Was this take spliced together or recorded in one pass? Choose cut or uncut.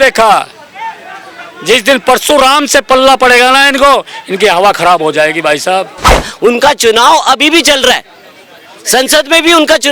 cut